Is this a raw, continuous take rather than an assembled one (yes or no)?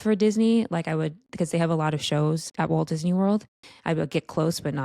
no